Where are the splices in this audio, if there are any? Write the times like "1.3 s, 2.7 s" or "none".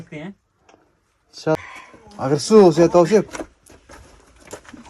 1.5 s